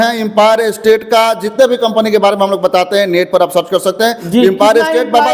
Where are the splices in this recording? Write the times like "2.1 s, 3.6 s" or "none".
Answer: none